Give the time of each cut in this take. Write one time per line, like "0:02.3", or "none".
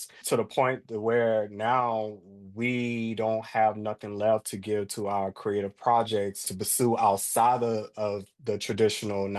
0:06.5